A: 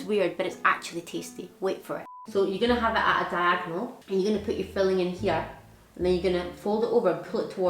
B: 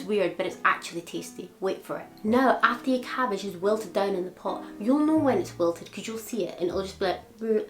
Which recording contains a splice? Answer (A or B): A